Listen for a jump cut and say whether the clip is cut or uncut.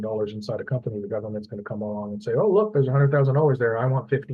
uncut